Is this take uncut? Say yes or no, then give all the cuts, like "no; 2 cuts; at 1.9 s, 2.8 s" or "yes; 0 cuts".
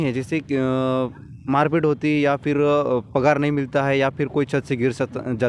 yes; 0 cuts